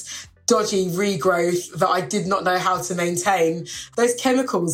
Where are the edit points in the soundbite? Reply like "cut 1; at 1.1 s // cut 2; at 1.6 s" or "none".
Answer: cut 1; at 3.8 s

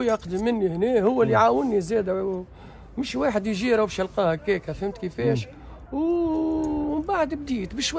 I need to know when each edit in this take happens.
none

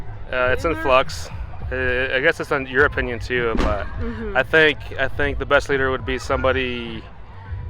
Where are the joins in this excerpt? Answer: none

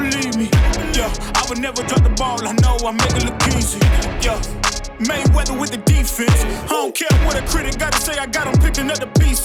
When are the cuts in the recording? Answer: none

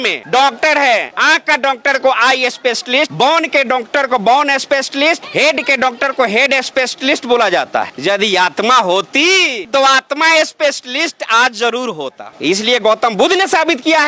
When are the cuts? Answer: none

